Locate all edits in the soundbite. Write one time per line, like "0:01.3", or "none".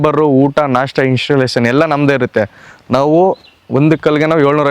none